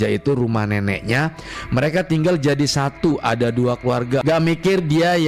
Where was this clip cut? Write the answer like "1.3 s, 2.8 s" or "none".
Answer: none